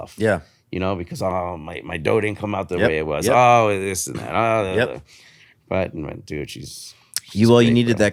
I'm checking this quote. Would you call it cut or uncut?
uncut